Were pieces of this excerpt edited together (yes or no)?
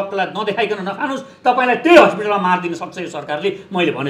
no